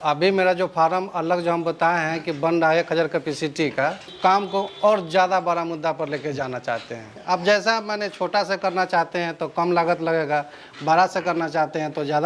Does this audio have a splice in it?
yes; 2 cuts; at 4.1 s, 7.2 s

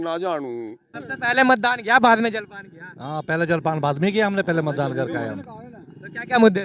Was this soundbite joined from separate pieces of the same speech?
no; 0 cuts

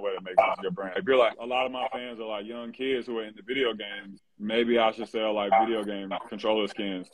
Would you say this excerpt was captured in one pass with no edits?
no; 1 cut; at 1.0 s

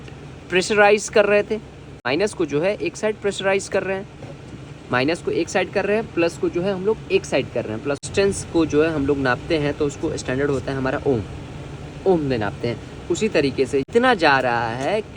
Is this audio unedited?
no; 3 cuts; at 2.1 s, 8.0 s, 13.9 s

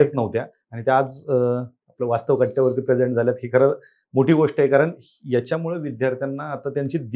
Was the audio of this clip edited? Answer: no; 0 cuts

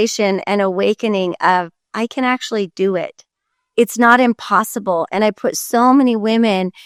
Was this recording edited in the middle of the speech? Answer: no; 0 cuts

